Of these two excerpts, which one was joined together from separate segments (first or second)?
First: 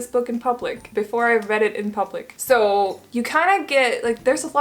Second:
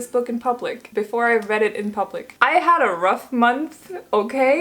second